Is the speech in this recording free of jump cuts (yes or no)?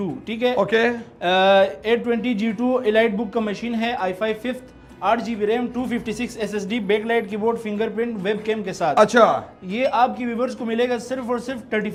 yes